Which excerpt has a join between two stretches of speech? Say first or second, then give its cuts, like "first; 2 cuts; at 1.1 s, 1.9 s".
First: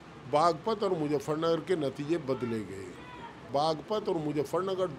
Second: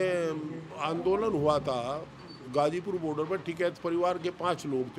first; 1 cut; at 3.4 s